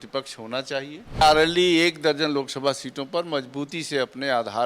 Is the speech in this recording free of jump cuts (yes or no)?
no